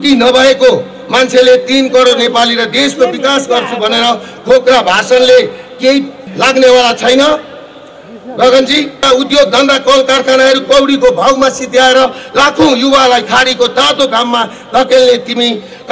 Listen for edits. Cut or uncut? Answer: cut